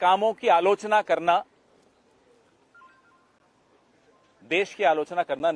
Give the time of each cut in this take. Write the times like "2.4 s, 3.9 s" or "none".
none